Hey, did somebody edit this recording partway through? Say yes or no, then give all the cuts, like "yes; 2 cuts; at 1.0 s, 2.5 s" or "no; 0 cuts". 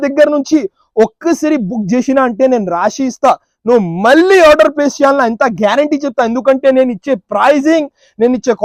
no; 0 cuts